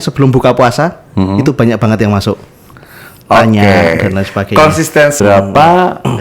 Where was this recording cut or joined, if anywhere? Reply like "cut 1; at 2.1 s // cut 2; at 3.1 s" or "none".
cut 1; at 5.1 s